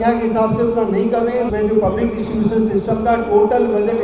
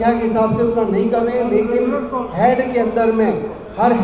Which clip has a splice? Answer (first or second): first